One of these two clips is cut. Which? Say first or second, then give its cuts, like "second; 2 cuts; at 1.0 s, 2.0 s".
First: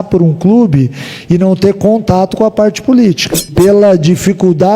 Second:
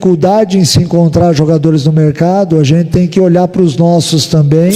first; 1 cut; at 3.5 s